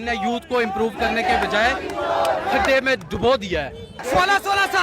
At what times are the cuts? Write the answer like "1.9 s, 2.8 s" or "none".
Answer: 3.9 s